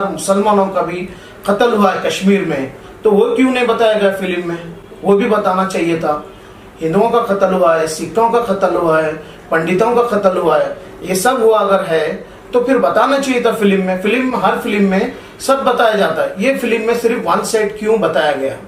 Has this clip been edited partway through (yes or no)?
no